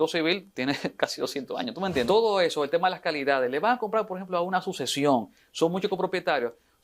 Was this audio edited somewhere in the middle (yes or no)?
yes